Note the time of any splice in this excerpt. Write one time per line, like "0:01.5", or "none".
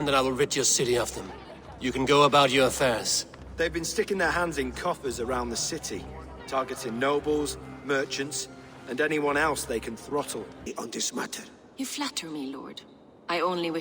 0:10.6